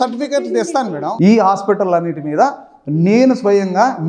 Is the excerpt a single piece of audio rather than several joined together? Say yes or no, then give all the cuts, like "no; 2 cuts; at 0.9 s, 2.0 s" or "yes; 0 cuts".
no; 1 cut; at 1.1 s